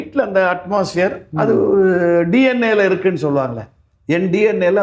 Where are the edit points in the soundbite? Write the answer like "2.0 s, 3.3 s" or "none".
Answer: none